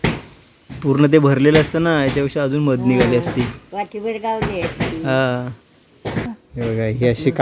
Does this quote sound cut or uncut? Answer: cut